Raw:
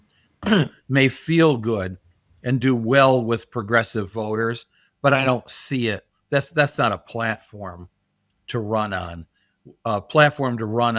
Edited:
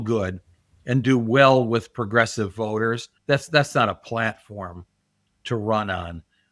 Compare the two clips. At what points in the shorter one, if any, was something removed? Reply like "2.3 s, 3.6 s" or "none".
3.1 s